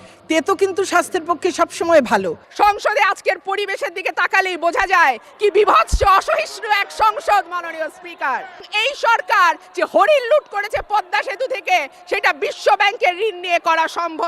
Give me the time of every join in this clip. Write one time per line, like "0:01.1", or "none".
0:02.4
0:08.7

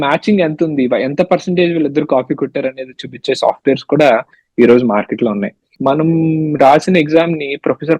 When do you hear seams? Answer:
none

